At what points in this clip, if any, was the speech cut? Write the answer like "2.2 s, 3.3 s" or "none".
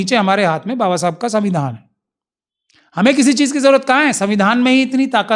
none